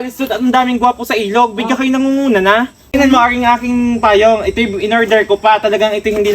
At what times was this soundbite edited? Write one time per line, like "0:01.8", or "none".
0:02.9